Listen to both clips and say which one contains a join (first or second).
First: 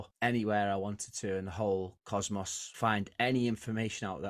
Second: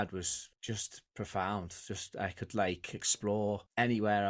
first